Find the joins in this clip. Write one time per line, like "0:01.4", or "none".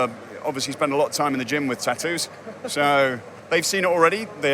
0:03.3